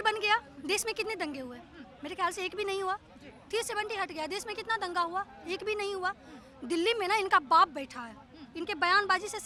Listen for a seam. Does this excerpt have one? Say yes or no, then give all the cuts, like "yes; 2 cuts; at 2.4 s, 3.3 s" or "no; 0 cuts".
no; 0 cuts